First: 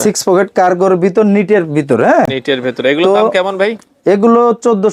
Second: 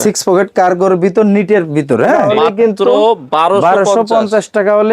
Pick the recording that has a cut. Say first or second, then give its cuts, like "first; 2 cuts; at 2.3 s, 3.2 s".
second; 1 cut; at 2.3 s